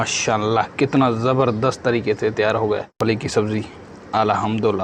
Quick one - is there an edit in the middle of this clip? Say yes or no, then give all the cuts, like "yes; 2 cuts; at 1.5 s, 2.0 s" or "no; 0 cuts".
yes; 1 cut; at 2.9 s